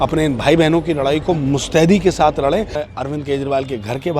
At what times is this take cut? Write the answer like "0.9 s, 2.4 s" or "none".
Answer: 2.8 s